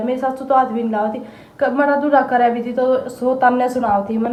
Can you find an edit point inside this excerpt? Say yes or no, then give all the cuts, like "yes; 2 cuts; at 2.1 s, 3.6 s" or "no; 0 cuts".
no; 0 cuts